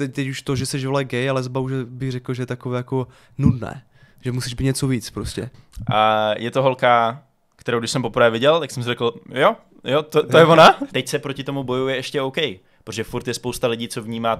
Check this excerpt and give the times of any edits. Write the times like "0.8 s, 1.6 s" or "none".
5.4 s, 10.9 s